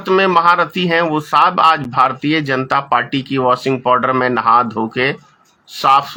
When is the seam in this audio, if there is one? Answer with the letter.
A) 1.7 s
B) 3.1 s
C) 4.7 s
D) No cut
D